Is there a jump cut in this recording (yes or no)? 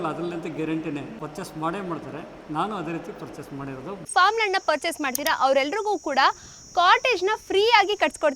yes